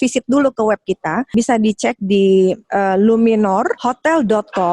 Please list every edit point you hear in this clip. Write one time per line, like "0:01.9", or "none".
0:01.3
0:02.6
0:03.8